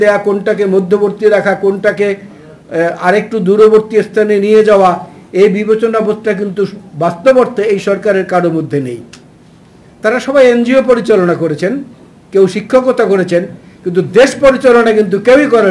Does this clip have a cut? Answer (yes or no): no